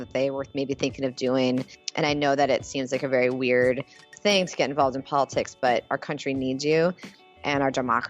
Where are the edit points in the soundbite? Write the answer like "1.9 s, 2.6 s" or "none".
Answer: 1.8 s